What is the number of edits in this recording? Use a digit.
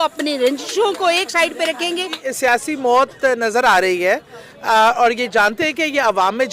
1